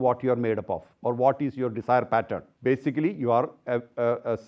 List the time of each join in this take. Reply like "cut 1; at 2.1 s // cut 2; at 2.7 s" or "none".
cut 1; at 2.4 s